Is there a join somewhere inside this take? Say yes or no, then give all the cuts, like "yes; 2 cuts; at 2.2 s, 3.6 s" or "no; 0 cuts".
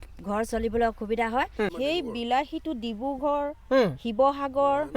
yes; 1 cut; at 1.7 s